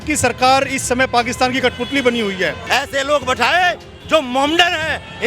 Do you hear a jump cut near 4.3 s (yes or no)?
no